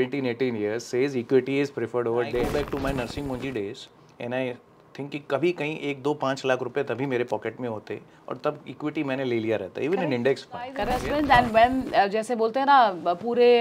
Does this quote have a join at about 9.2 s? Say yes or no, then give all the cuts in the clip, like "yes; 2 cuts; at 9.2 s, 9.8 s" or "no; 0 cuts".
no; 2 cuts; at 2.5 s, 10.9 s